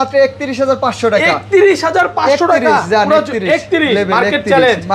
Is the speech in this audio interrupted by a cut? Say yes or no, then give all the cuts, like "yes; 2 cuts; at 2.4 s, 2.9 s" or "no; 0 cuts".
no; 0 cuts